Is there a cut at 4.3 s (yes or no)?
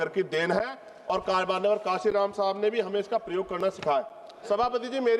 yes